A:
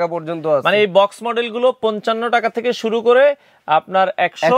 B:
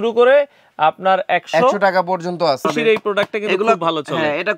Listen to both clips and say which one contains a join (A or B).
B